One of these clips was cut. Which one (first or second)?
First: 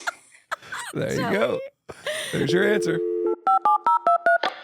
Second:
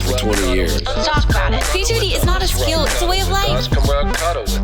first